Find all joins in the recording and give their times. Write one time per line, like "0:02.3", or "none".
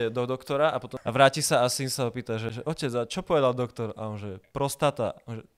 0:00.9
0:02.5